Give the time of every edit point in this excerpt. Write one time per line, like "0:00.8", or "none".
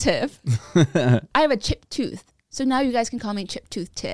0:01.3